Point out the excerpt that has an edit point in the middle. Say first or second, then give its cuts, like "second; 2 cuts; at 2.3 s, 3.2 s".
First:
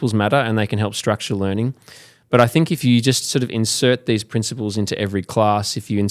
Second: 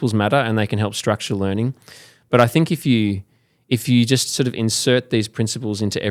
first; 1 cut; at 2.8 s